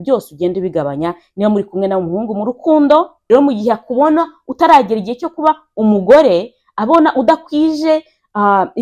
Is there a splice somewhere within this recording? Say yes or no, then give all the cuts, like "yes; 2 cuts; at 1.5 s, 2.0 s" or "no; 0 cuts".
yes; 1 cut; at 3.2 s